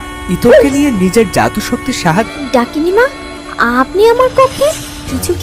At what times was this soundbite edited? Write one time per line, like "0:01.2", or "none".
0:02.3